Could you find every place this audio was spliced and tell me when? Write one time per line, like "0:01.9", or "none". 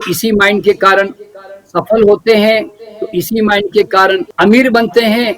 0:04.3

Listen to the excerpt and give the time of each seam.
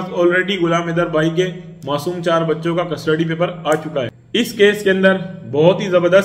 0:04.2

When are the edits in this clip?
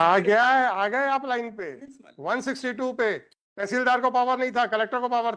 none

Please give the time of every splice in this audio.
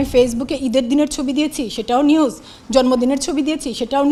none

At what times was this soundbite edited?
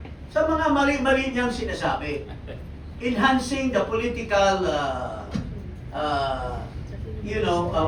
none

